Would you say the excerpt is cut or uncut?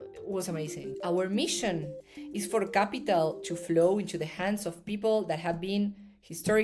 cut